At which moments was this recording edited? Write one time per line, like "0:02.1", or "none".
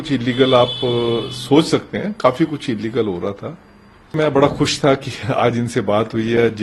0:04.2